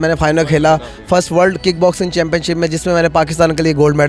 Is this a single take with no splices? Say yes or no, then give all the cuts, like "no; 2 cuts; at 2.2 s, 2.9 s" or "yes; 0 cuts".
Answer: yes; 0 cuts